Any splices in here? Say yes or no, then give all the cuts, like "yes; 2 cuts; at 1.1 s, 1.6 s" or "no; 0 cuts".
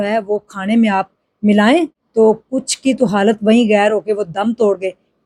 yes; 1 cut; at 2.0 s